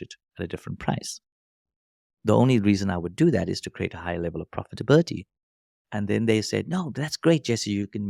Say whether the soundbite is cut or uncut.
uncut